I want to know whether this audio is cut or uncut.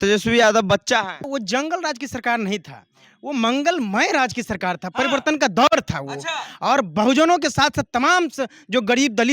cut